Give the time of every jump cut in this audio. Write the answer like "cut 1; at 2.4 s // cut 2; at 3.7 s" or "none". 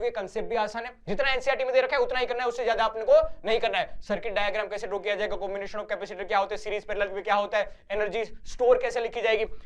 none